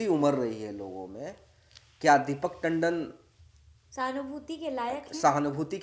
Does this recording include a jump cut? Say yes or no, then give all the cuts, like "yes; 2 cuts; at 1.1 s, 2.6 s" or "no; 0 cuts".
no; 0 cuts